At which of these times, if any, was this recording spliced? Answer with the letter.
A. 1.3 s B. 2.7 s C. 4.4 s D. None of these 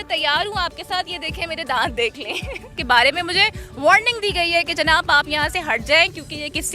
B